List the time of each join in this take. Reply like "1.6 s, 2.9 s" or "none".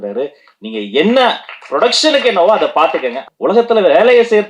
3.2 s